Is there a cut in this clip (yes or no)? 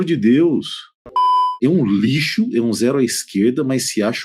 yes